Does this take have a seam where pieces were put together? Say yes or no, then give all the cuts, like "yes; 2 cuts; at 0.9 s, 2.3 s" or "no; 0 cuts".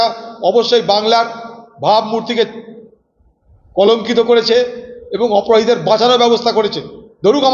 no; 0 cuts